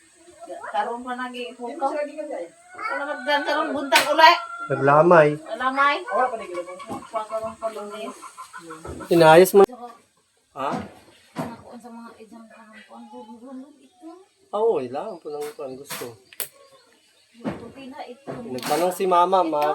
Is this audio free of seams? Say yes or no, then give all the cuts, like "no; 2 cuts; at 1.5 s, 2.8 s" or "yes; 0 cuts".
no; 1 cut; at 9.6 s